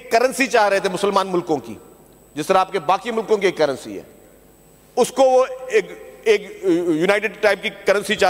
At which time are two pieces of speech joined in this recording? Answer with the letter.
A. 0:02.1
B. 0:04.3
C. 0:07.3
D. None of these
D